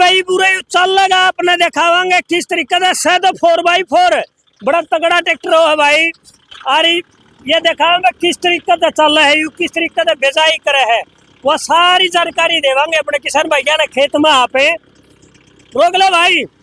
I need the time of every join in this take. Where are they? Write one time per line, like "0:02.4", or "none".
none